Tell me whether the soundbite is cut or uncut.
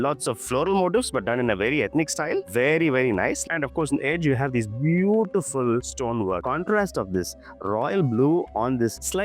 cut